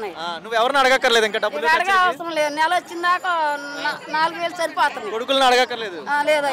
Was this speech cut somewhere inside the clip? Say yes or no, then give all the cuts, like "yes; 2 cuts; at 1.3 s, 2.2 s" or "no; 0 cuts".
no; 0 cuts